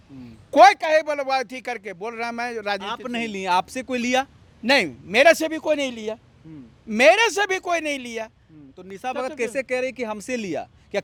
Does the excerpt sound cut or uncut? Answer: uncut